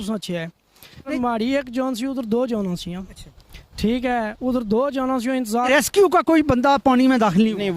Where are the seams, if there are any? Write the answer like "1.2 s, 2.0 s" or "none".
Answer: 1.1 s, 5.7 s